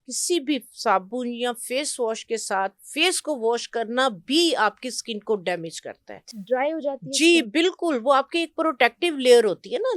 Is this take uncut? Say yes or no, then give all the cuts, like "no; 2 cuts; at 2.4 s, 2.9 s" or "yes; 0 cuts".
yes; 0 cuts